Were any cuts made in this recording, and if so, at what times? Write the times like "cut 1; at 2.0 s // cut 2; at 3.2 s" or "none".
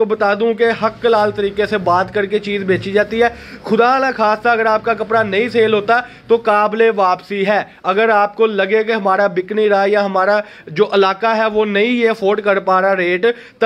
none

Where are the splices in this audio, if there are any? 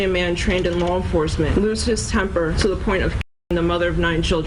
cut 1; at 1.5 s // cut 2; at 2.5 s

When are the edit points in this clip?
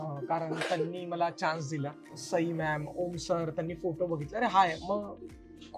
cut 1; at 2.2 s

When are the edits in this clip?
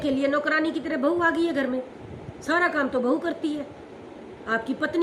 none

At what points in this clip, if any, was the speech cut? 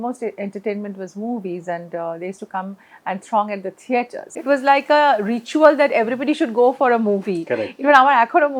cut 1; at 4.2 s

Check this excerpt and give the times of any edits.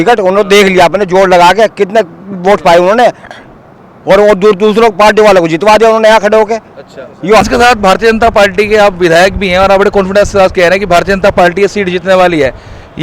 cut 1; at 7.4 s

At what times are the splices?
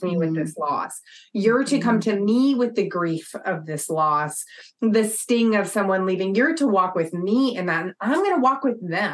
none

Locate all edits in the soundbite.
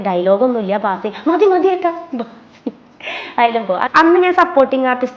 cut 1; at 3.8 s

